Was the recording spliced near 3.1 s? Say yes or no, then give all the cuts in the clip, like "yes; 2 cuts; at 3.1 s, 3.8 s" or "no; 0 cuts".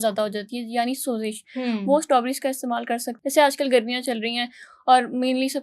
yes; 1 cut; at 3.1 s